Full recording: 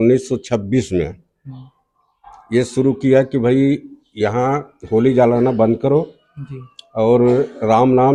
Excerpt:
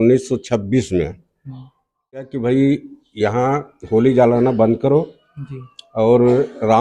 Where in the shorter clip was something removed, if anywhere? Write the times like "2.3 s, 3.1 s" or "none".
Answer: 2.3 s